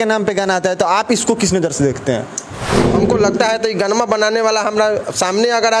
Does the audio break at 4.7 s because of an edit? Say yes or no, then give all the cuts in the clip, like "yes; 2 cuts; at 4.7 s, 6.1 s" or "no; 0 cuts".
no; 1 cut; at 2.9 s